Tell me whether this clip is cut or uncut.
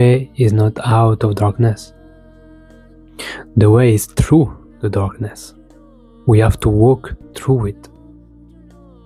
uncut